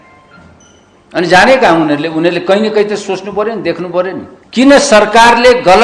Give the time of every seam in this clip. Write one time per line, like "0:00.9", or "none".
0:04.3